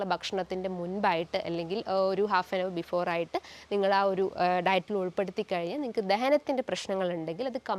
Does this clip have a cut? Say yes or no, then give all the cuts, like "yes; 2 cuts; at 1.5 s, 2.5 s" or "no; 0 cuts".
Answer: no; 0 cuts